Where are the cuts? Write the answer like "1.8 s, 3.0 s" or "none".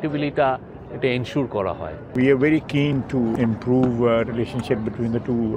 2.1 s, 3.3 s